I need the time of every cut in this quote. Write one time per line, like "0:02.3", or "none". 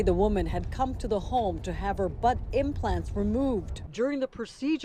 none

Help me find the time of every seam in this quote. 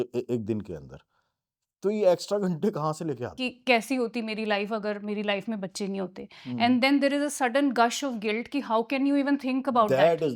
0:03.3

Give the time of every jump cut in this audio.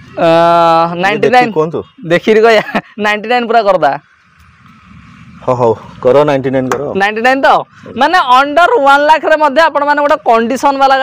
none

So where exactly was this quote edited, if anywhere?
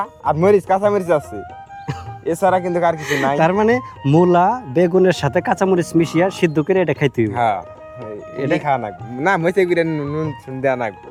none

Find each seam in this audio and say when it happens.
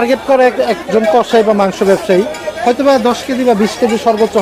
none

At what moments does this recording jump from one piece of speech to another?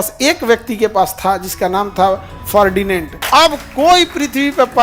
0:03.1

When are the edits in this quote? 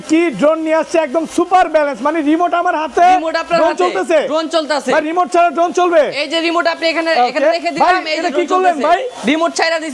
none

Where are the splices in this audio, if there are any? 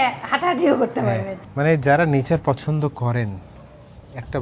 0:01.4

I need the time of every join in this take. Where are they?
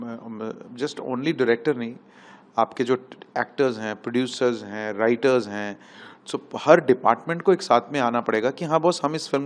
none

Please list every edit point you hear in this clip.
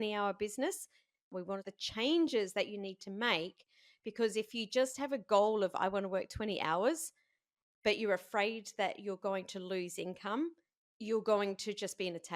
0:01.4

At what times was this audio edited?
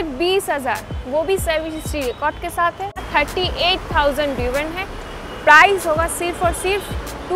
0:03.0

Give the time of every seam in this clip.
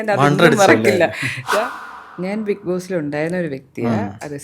0:01.6

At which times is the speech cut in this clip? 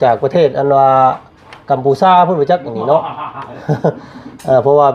none

